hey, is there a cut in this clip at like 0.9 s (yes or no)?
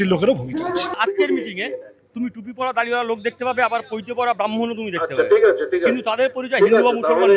yes